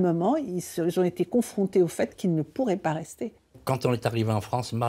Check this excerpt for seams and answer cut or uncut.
cut